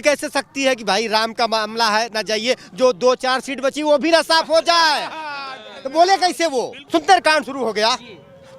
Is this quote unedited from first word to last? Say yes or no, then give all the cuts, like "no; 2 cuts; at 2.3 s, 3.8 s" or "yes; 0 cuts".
no; 1 cut; at 6.8 s